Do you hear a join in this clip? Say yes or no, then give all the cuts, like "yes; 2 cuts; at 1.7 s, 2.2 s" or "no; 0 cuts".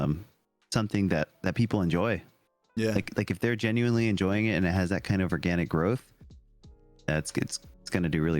no; 0 cuts